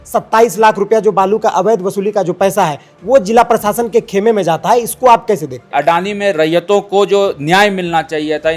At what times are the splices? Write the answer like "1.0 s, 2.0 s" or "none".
5.7 s

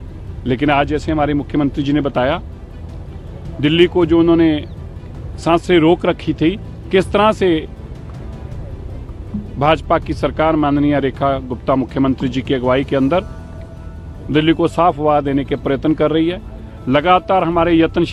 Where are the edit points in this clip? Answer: none

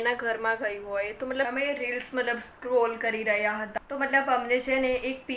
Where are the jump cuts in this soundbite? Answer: 1.5 s

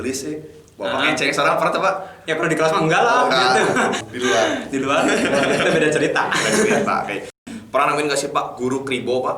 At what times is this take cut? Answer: 4.0 s, 7.4 s

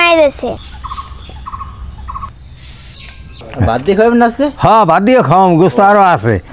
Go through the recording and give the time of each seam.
3.4 s

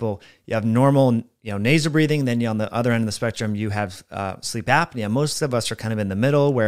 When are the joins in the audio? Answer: none

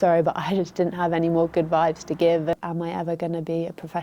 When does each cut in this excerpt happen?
2.6 s

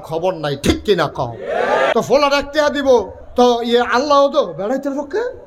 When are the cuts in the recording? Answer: 1.9 s, 3.2 s

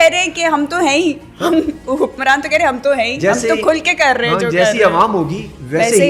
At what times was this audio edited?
none

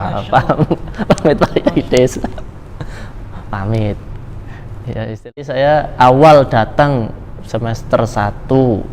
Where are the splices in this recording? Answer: 5.3 s

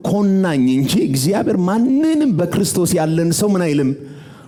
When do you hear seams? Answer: none

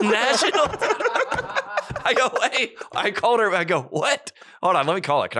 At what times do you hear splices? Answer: none

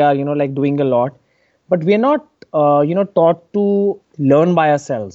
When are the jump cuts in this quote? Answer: 4.0 s

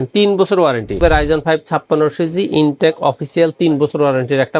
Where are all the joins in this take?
1.0 s

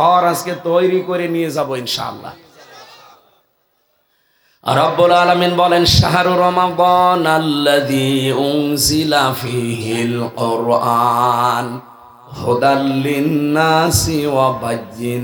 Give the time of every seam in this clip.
none

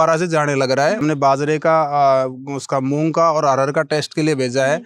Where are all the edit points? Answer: 1.0 s

